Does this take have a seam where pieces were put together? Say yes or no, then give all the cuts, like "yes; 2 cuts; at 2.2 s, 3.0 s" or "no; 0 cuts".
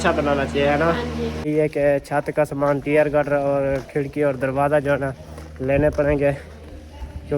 yes; 1 cut; at 1.5 s